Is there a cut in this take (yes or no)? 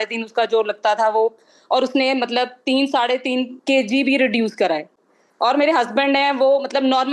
no